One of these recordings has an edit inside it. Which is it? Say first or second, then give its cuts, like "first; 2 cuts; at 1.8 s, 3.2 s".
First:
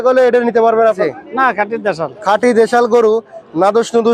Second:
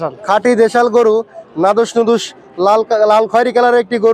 first; 1 cut; at 1.0 s